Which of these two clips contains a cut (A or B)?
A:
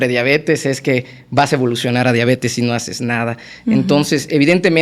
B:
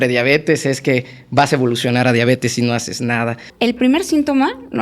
B